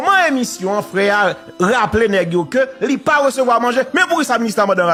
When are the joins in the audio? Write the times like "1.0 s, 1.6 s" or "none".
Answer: none